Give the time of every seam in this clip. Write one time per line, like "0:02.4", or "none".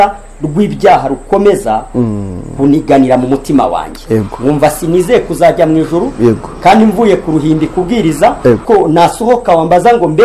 0:08.6